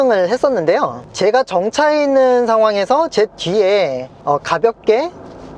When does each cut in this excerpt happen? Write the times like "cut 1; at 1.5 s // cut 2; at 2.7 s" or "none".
cut 1; at 1.0 s // cut 2; at 4.1 s